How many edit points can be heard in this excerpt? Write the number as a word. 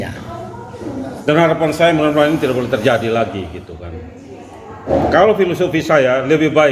two